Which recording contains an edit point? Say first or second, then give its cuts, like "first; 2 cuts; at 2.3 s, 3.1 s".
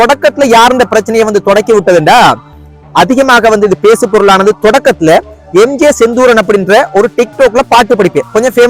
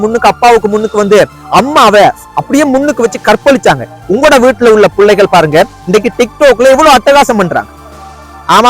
second; 1 cut; at 3.9 s